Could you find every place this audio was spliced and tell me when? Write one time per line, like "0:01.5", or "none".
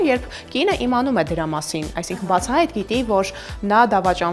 none